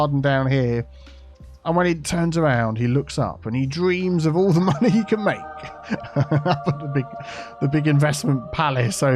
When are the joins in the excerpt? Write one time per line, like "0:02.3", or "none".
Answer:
none